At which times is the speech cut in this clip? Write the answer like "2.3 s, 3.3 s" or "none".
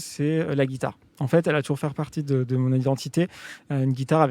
none

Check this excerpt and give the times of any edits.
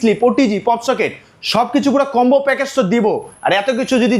none

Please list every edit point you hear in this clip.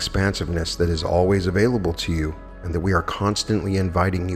none

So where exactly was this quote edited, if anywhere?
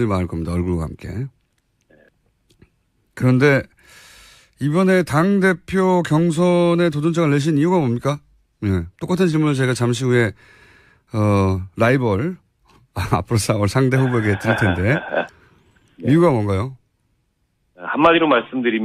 10.5 s

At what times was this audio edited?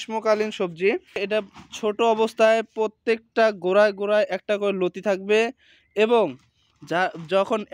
1.2 s

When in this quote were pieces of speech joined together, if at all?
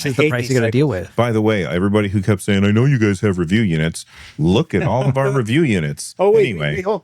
1.1 s

